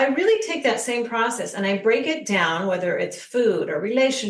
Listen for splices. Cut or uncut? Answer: uncut